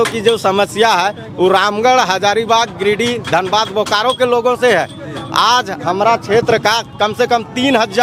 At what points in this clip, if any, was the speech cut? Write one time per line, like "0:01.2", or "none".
none